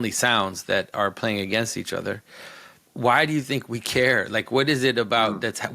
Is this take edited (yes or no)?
yes